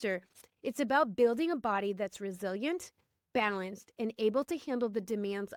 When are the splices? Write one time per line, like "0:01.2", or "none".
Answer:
none